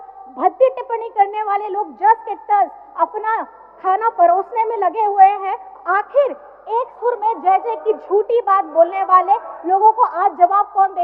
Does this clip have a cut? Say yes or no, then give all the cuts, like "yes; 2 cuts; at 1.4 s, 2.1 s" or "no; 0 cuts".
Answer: no; 0 cuts